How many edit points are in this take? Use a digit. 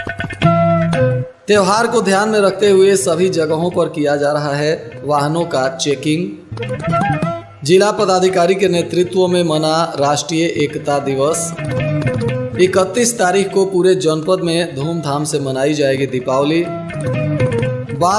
1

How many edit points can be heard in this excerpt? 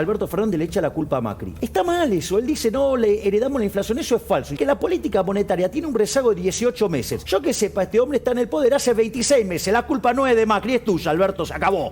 3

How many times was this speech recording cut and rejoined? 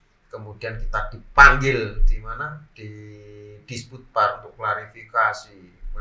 0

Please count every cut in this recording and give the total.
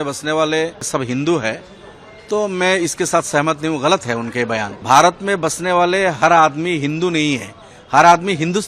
2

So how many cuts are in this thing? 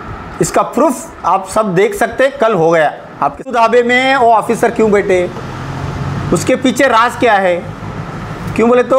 1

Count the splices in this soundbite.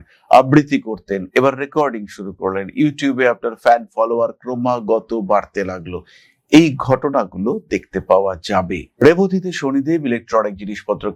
0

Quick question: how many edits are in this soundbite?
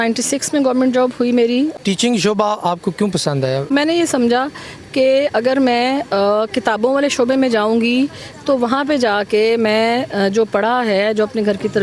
2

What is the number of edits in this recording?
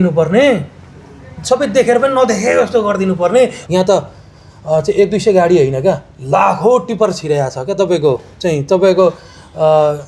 1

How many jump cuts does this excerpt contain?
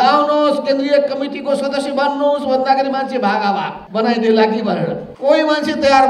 2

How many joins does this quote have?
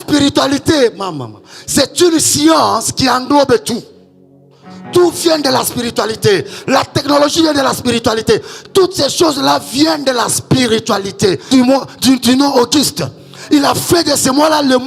1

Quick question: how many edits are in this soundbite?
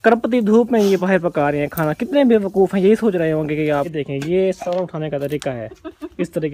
1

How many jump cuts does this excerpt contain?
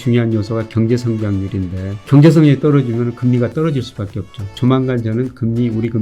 2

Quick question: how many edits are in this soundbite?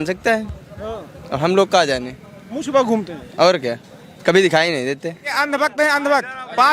1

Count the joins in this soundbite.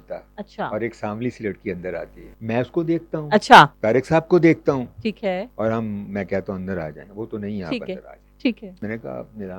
4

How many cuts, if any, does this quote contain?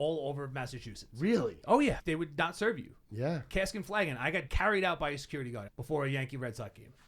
3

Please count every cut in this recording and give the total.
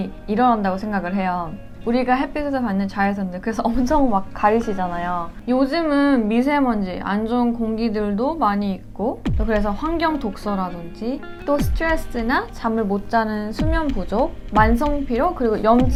0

